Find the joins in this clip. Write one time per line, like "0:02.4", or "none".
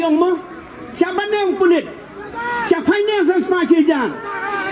none